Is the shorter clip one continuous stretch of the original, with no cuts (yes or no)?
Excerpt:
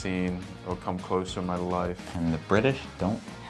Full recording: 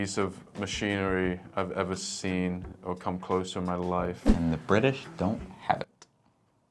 yes